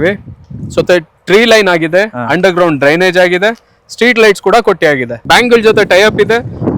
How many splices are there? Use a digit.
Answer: 1